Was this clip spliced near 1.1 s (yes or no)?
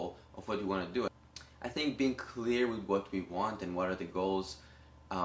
yes